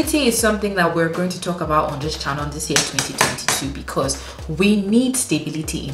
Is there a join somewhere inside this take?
no; 0 cuts

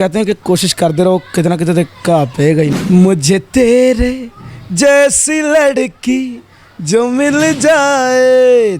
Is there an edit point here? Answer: yes; 1 cut; at 2.8 s

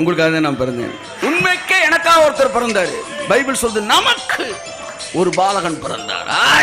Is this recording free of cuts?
no; 1 cut; at 1.0 s

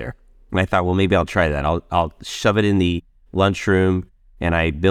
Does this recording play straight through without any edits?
yes; 0 cuts

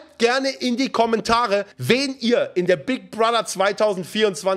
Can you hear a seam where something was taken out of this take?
yes; 1 cut; at 1.7 s

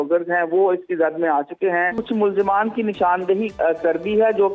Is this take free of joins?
no; 1 cut; at 2.0 s

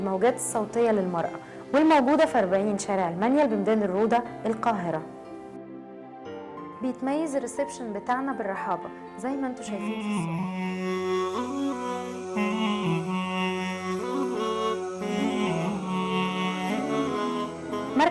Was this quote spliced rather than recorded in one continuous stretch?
yes; 2 cuts; at 14.4 s, 15.8 s

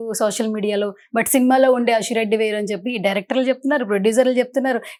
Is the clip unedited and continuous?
yes; 0 cuts

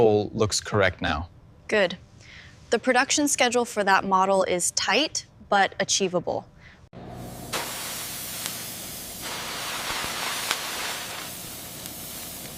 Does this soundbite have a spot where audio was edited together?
no; 0 cuts

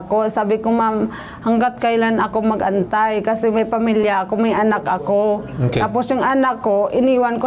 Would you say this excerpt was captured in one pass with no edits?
yes; 0 cuts

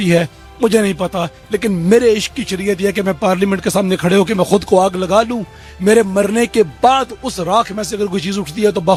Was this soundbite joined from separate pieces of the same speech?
no; 0 cuts

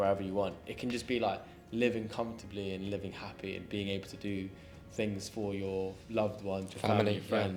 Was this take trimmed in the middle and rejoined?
no; 0 cuts

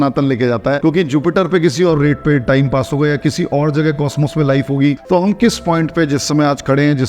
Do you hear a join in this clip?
yes; 2 cuts; at 0.8 s, 5.0 s

